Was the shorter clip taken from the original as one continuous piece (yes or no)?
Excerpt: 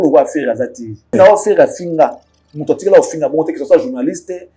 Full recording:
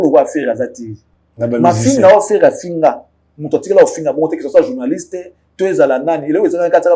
no